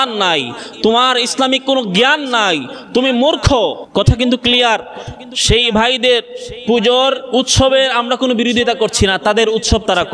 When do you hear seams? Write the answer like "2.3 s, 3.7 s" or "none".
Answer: 3.8 s